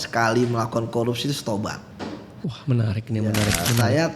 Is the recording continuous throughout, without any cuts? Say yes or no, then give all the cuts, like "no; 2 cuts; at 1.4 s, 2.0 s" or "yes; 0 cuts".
no; 1 cut; at 1.9 s